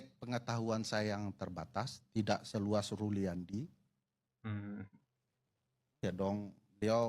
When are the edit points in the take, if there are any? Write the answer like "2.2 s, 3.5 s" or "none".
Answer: none